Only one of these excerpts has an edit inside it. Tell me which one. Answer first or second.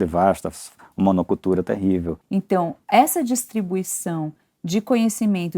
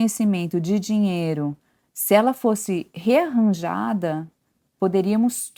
first